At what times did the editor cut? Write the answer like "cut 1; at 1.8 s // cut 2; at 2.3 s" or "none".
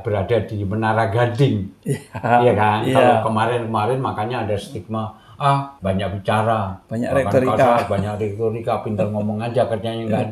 cut 1; at 5.7 s